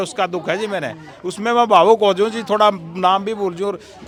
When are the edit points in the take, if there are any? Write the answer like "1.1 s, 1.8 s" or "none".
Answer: none